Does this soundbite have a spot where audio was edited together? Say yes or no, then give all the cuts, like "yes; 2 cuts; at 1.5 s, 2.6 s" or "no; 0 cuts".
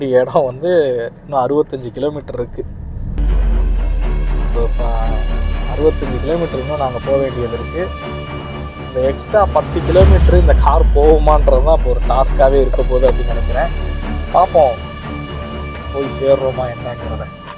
no; 0 cuts